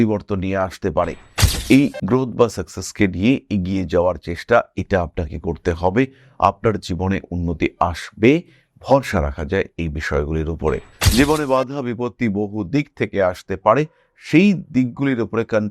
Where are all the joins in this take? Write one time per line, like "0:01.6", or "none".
0:10.9